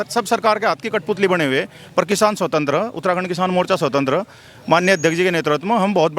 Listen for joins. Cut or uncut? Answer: uncut